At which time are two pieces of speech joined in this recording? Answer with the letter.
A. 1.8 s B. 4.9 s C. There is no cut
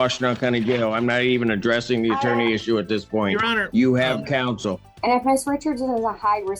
B